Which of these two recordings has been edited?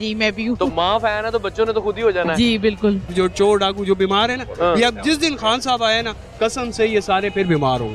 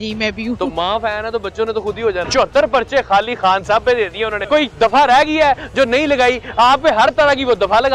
second; 2 cuts; at 2.2 s, 4.4 s

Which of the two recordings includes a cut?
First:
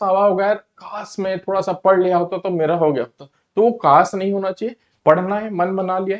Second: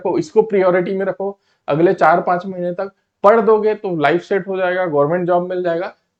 first; 1 cut; at 4.8 s

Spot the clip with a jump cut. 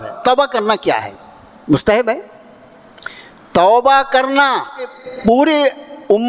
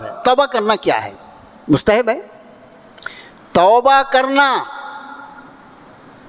first; 1 cut; at 5.1 s

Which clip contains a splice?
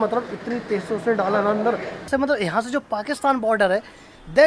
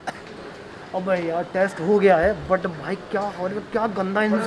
first; 1 cut; at 2.1 s

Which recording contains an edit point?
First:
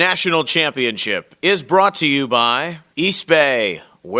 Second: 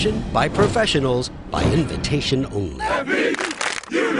first; 1 cut; at 2.8 s

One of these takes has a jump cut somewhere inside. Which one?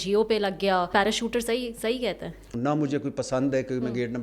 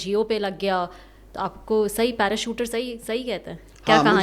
first; 2 cuts; at 0.9 s, 2.5 s

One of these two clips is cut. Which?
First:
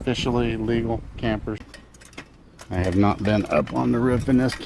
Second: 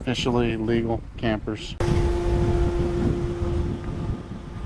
first; 1 cut; at 1.7 s

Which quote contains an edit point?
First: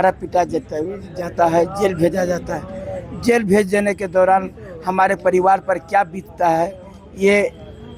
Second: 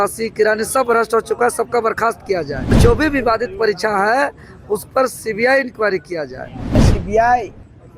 second; 2 cuts; at 2.8 s, 6.8 s

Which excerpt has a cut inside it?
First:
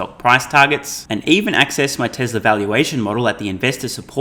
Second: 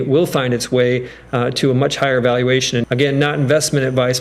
second; 1 cut; at 2.8 s

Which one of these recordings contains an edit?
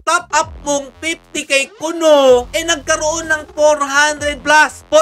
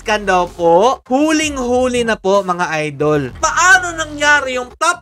second; 2 cuts; at 1.0 s, 3.3 s

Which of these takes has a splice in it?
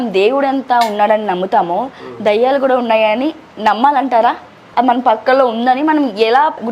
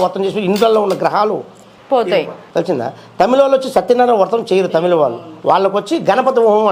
first; 1 cut; at 4.6 s

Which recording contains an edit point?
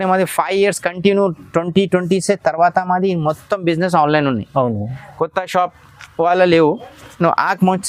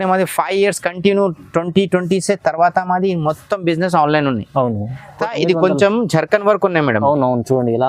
second; 1 cut; at 5.2 s

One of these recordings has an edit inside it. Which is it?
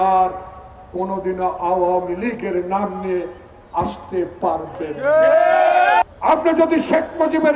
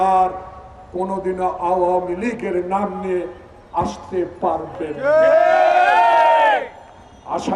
first; 1 cut; at 6.0 s

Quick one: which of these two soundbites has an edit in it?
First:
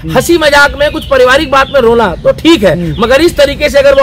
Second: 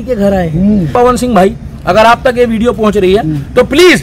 second; 1 cut; at 0.9 s

